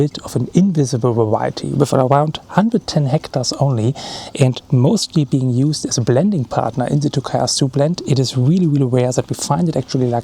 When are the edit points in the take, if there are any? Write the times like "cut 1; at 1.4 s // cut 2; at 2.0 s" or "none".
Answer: none